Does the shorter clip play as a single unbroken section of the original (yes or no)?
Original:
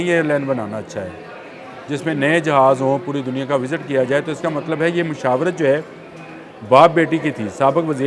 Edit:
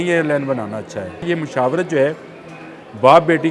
no